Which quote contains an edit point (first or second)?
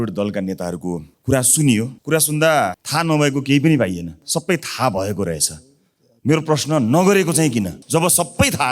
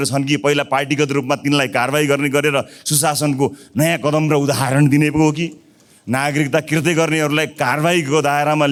first